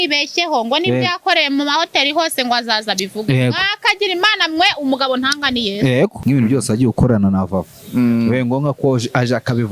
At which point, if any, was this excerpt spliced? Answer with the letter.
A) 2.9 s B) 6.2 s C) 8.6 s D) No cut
B